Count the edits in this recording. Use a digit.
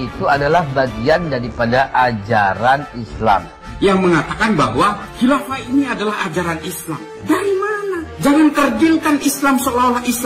0